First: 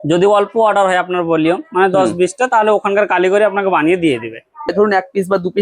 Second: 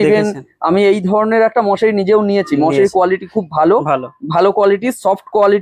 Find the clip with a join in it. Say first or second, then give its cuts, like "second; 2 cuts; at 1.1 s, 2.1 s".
first; 1 cut; at 4.7 s